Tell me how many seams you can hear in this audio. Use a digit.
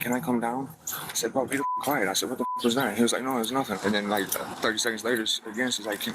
2